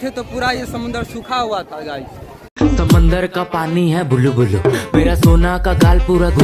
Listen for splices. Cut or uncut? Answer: uncut